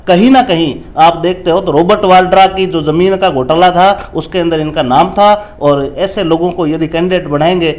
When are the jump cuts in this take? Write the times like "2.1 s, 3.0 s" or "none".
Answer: none